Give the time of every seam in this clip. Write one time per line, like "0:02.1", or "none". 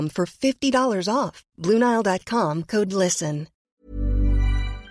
0:03.5